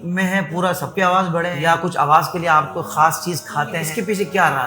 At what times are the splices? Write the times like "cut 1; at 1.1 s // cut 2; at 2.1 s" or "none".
cut 1; at 1.5 s // cut 2; at 3.8 s

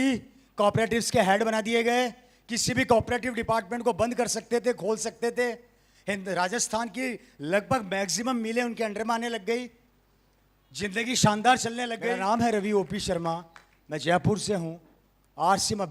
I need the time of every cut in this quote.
cut 1; at 11.9 s

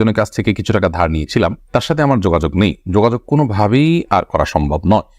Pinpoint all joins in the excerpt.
none

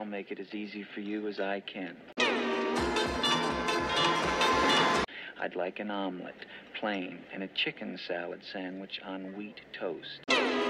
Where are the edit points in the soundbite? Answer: none

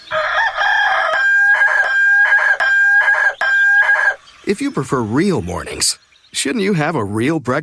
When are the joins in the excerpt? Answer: cut 1; at 1.1 s

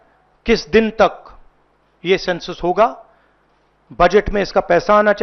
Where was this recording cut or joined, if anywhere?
none

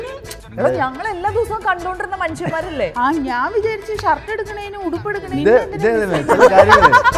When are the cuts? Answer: cut 1; at 5.3 s

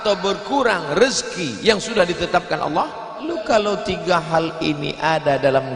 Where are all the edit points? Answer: cut 1; at 3.2 s

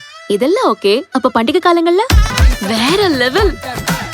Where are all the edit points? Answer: cut 1; at 2.4 s

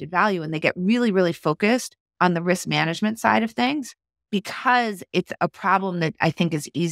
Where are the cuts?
cut 1; at 2.0 s // cut 2; at 4.2 s // cut 3; at 5.3 s

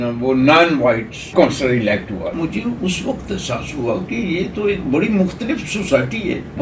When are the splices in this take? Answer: cut 1; at 1.3 s // cut 2; at 2.3 s

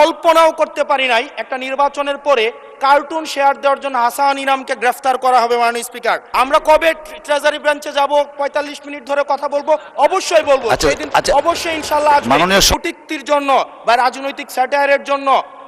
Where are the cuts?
cut 1; at 6.3 s // cut 2; at 12.7 s

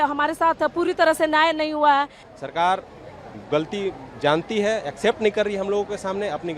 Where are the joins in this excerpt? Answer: cut 1; at 2.2 s

